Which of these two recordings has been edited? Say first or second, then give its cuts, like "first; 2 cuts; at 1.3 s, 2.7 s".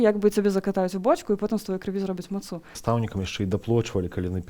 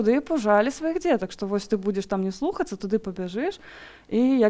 first; 1 cut; at 2.7 s